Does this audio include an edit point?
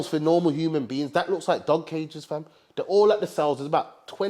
no; 0 cuts

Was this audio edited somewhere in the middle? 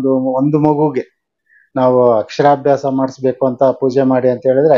no; 0 cuts

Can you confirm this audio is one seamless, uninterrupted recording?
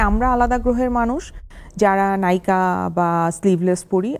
yes; 0 cuts

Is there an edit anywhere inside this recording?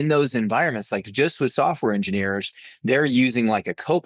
no; 0 cuts

